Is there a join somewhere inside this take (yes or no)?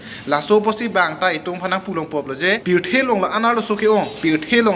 yes